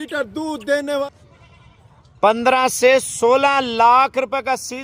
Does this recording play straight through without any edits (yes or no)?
no